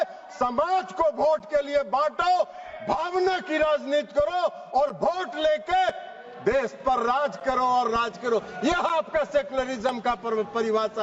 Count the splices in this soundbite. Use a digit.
0